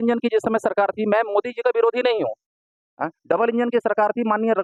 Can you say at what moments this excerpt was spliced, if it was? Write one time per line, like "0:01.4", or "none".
none